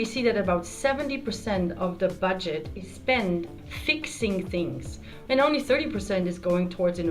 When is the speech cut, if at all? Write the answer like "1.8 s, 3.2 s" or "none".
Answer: 3.5 s, 5.1 s